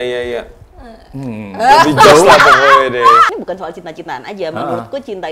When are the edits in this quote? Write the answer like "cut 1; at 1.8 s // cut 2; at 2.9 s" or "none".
cut 1; at 3.3 s